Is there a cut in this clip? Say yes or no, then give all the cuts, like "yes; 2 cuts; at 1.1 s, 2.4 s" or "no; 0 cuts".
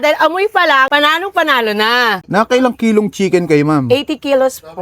yes; 1 cut; at 2.2 s